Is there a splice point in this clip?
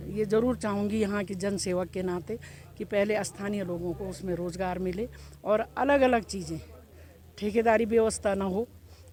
no; 0 cuts

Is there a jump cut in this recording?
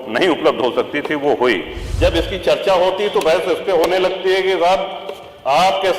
yes; 1 cut; at 1.8 s

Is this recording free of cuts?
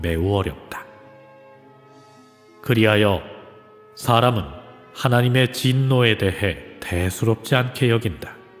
yes; 0 cuts

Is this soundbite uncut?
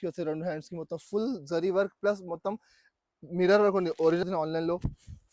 no; 1 cut; at 4.2 s

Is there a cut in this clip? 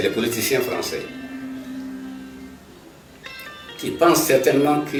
no; 0 cuts

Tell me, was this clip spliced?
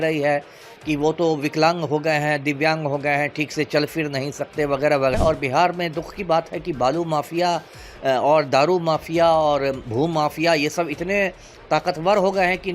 yes; 1 cut; at 5.1 s

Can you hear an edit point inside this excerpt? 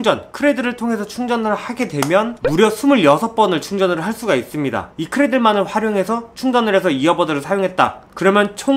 yes; 1 cut; at 4.9 s

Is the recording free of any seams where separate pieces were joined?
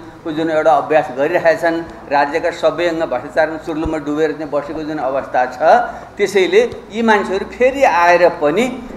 yes; 0 cuts

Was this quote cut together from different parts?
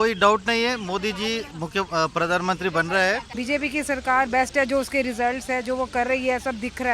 yes; 1 cut; at 3.3 s

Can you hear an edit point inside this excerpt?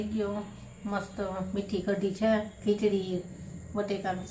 no; 0 cuts

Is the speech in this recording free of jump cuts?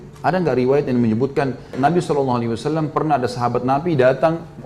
no; 1 cut; at 1.7 s

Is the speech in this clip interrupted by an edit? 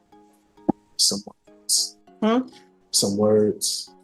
no; 0 cuts

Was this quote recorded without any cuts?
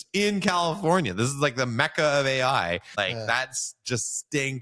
no; 1 cut; at 2.9 s

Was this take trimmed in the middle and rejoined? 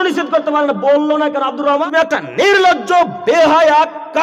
yes; 1 cut; at 1.8 s

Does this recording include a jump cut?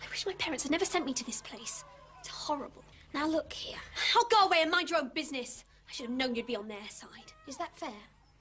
no; 0 cuts

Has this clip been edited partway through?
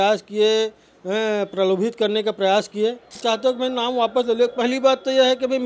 yes; 1 cut; at 3.1 s

